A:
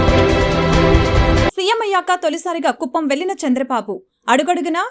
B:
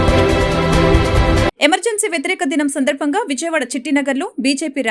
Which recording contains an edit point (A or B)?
A